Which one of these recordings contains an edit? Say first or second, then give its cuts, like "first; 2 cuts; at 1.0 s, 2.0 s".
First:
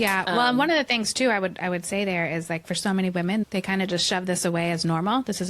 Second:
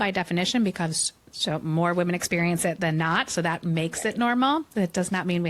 first; 1 cut; at 3.4 s